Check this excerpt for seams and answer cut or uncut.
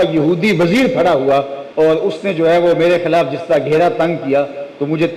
cut